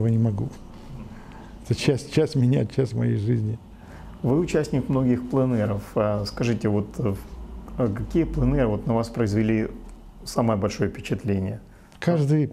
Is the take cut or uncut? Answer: uncut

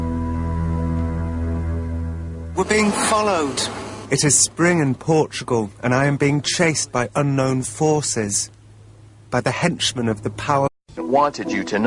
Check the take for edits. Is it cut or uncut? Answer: uncut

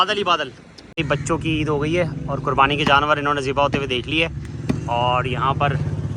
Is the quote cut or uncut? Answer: cut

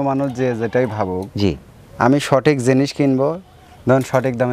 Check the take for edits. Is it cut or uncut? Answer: uncut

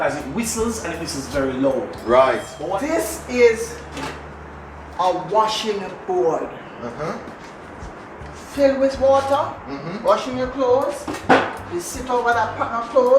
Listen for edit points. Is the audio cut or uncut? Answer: cut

